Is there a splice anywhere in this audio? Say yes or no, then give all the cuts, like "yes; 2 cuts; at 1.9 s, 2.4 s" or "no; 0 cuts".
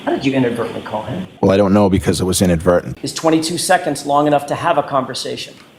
yes; 2 cuts; at 1.2 s, 3.0 s